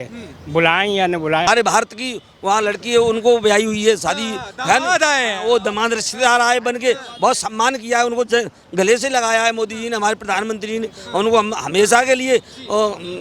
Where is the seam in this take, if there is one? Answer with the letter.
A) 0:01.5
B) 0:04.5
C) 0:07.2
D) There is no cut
A